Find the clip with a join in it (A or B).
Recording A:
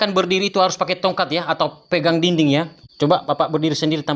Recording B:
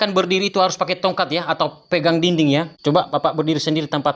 B